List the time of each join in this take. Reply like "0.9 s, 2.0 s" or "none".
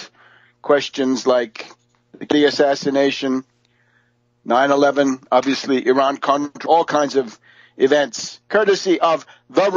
4.0 s